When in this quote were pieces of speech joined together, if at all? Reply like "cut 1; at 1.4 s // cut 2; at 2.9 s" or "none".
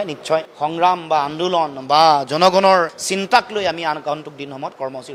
none